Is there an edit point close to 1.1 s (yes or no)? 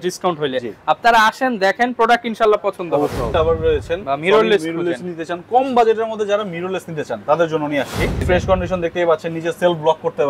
no